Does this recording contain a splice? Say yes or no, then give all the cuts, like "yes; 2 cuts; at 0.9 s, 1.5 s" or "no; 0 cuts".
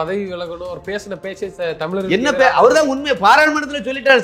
no; 0 cuts